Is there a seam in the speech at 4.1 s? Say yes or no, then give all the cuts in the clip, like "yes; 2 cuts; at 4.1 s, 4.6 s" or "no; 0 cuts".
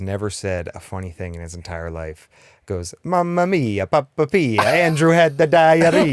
no; 0 cuts